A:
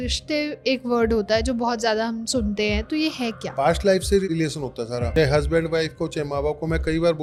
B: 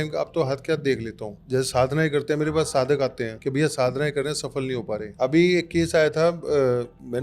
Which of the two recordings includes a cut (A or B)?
B